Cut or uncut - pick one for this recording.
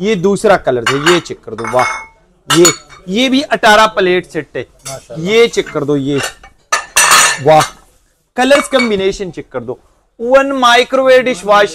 uncut